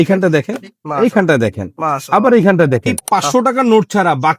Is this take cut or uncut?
cut